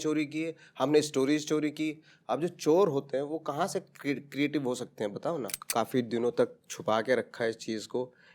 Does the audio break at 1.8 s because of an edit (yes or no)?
no